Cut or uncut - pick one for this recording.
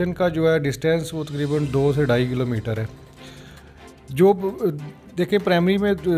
uncut